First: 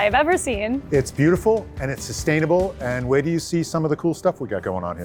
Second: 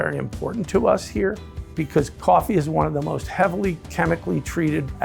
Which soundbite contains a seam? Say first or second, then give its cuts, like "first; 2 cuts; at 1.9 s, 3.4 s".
second; 1 cut; at 3.8 s